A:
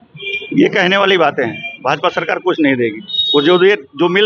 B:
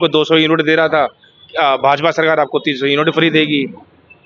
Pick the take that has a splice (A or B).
A